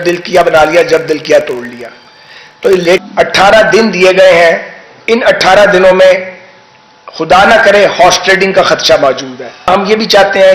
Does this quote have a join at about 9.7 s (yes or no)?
yes